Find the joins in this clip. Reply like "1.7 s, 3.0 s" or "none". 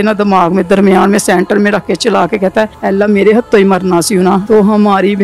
2.8 s, 4.4 s

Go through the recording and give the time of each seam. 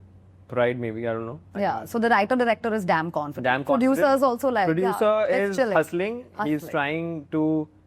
none

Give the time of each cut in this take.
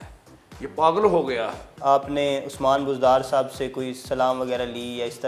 1.7 s

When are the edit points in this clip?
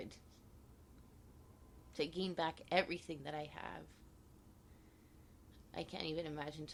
none

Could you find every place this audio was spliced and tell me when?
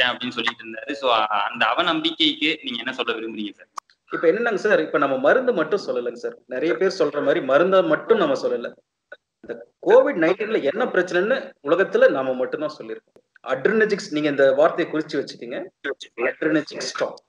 3.7 s, 13.2 s

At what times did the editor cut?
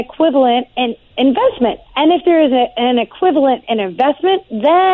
1.1 s, 1.8 s

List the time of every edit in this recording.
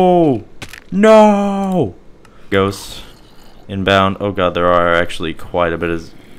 2.5 s

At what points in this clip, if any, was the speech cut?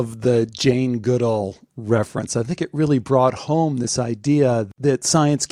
none

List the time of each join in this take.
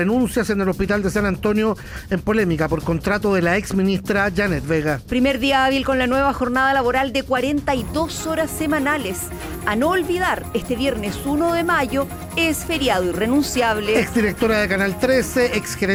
none

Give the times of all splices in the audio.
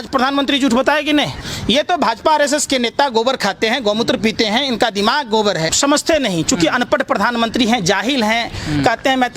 1.4 s, 5.7 s

